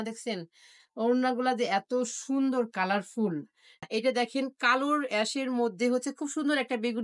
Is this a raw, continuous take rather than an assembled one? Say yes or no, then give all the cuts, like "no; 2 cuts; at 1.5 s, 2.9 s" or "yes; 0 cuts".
no; 1 cut; at 3.8 s